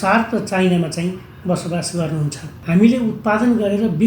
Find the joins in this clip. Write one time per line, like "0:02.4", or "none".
0:02.5